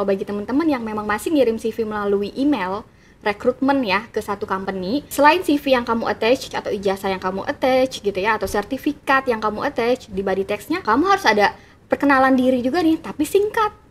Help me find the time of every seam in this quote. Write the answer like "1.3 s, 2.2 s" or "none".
5.0 s, 6.5 s, 10.8 s